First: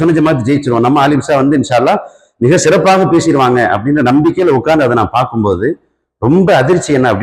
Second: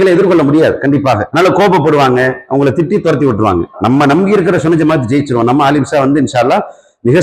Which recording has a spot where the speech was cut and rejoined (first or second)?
second